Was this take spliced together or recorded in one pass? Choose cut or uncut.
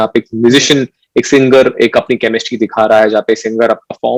uncut